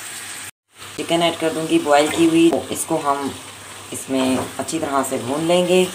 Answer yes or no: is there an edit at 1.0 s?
yes